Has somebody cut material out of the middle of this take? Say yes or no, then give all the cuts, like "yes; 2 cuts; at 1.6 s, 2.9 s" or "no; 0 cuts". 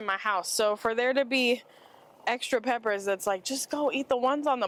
no; 0 cuts